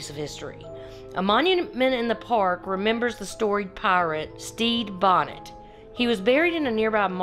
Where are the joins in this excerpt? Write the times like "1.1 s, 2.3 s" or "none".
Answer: 4.4 s